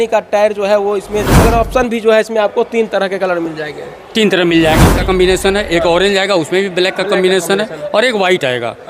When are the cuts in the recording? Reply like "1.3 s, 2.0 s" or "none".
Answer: 1.3 s, 4.9 s